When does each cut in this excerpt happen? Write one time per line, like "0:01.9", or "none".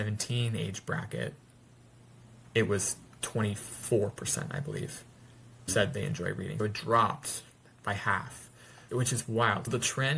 none

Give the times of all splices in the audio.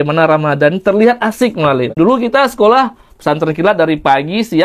0:01.9

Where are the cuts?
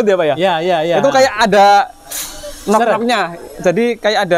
none

